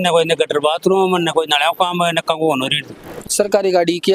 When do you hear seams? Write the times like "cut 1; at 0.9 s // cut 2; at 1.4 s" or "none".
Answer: cut 1; at 3.2 s